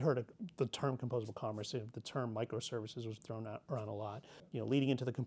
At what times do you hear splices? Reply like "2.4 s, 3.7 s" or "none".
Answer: 4.4 s